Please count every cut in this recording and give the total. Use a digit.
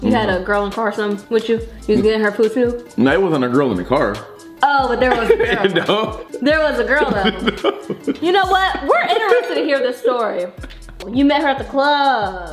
1